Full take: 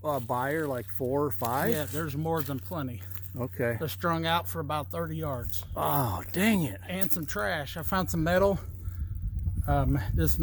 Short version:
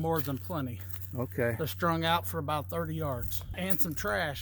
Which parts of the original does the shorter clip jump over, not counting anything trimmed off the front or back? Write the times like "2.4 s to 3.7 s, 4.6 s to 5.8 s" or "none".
5.7 s to 6.8 s